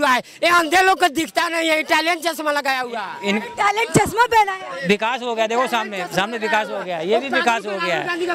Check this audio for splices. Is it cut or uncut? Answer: uncut